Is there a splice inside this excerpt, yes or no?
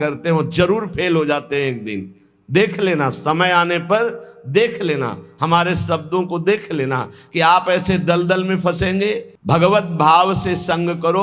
yes